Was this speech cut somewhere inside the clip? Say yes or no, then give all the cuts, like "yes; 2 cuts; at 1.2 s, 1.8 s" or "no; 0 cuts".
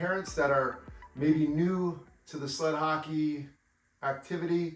no; 0 cuts